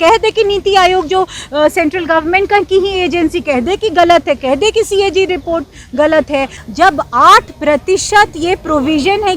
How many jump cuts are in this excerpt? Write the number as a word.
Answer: one